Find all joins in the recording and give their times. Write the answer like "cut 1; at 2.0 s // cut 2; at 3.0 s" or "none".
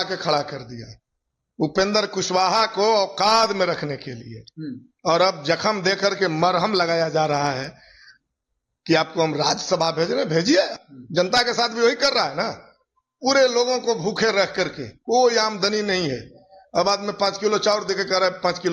cut 1; at 10.8 s